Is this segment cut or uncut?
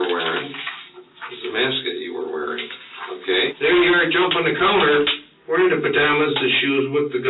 cut